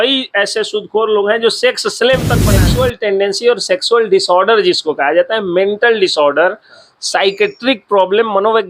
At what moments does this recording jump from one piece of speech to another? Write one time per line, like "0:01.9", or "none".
0:02.5